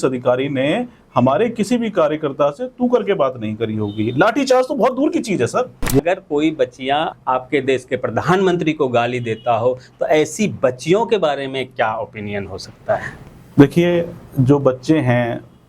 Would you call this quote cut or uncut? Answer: cut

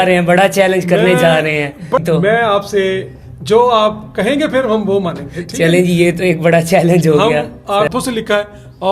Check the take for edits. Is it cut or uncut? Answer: cut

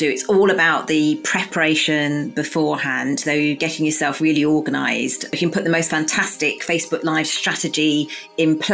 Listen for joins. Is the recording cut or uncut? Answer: cut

